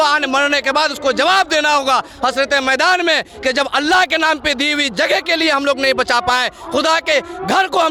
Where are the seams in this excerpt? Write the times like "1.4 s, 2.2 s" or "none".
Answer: none